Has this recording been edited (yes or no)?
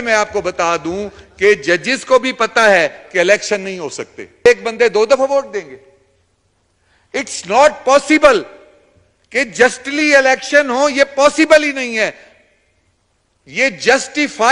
yes